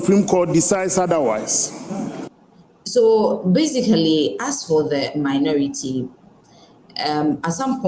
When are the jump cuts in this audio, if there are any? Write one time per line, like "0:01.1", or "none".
none